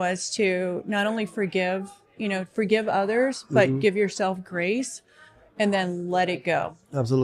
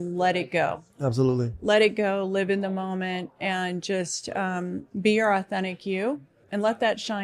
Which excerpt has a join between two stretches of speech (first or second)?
second